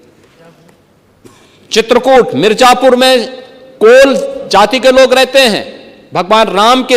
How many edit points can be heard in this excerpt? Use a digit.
0